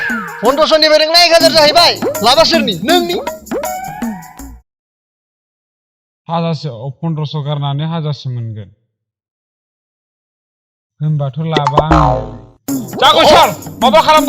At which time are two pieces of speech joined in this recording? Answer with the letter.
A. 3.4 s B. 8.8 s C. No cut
C